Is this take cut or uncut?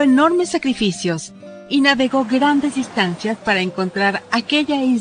uncut